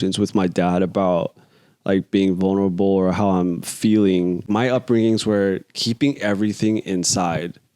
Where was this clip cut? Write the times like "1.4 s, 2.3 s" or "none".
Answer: 4.5 s

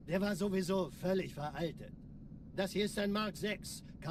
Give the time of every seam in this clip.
none

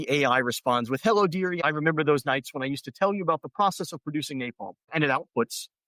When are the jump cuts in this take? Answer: 1.6 s, 4.9 s

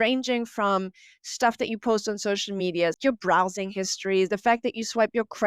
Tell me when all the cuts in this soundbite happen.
3.0 s

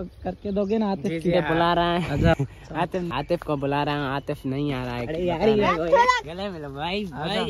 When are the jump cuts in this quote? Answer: 1.3 s, 5.0 s

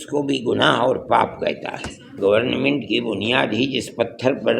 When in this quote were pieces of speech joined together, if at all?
2.2 s

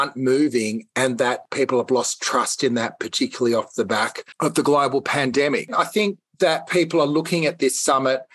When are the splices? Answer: 1.5 s, 4.2 s, 5.8 s

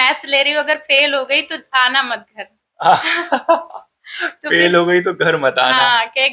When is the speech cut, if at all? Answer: none

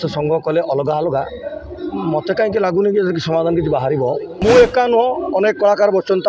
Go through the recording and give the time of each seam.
4.3 s

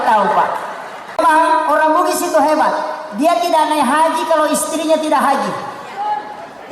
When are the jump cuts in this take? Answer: 1.2 s

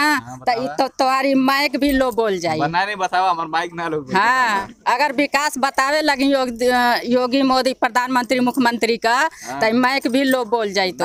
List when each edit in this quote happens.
none

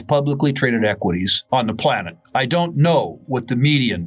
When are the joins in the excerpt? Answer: 1.4 s, 2.1 s

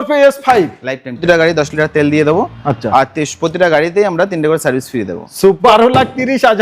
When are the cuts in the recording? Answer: 1.1 s, 5.6 s

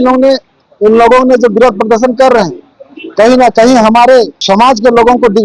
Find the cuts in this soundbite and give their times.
4.4 s

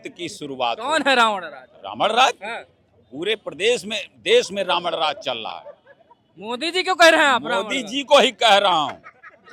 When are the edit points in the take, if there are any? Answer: none

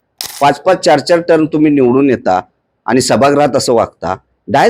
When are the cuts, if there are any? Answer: none

